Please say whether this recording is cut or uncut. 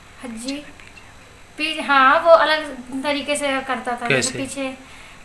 cut